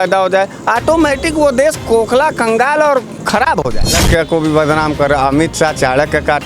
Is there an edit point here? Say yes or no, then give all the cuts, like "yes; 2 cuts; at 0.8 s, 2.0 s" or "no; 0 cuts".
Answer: yes; 1 cut; at 4.0 s